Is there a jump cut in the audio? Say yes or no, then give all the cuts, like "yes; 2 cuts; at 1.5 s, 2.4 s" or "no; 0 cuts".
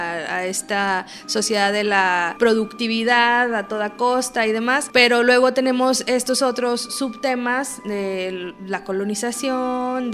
yes; 2 cuts; at 2.3 s, 4.8 s